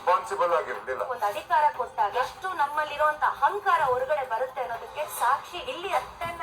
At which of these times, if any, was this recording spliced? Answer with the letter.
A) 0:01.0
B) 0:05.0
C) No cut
B